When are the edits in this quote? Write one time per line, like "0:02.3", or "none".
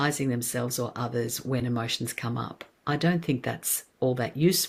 none